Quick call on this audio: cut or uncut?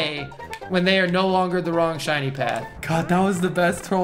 cut